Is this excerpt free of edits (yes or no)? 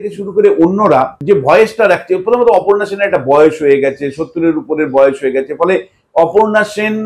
no